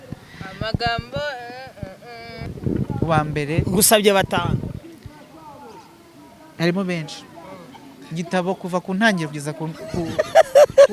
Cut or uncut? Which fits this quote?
cut